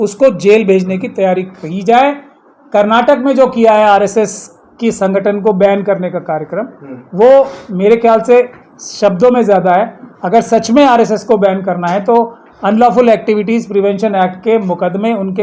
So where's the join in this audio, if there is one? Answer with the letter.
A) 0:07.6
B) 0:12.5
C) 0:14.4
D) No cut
D